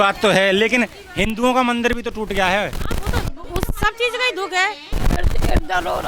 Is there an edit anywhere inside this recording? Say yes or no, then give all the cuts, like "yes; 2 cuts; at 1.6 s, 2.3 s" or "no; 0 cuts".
yes; 1 cut; at 4.9 s